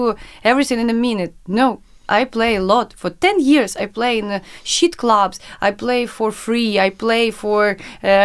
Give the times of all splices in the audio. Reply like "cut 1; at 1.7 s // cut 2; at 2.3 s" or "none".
none